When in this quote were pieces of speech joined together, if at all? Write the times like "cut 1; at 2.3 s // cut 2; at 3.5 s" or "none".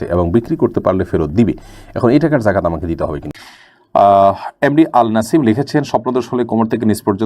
cut 1; at 3.2 s